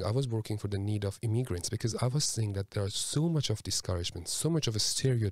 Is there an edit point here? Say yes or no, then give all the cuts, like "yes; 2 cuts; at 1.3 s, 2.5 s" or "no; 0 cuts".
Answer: no; 0 cuts